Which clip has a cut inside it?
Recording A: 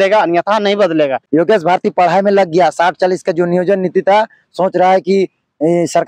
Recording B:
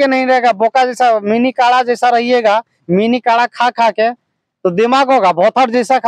A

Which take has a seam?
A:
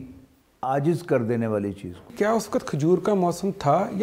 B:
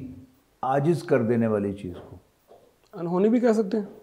A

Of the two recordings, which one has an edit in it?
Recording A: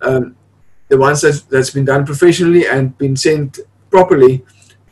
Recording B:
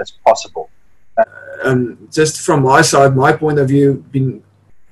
B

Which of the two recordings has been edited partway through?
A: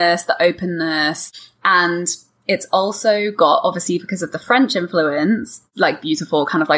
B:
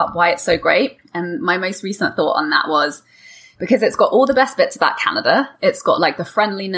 A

